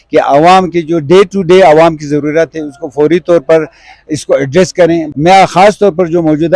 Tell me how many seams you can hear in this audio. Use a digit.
1